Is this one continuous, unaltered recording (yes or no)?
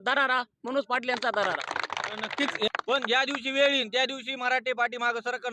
no